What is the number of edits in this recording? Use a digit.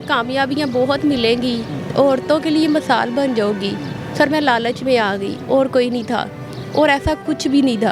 0